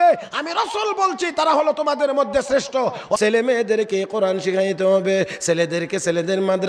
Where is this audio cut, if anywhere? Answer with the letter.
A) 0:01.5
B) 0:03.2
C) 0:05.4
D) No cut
B